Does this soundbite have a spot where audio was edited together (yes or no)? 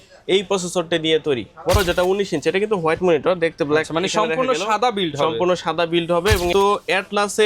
yes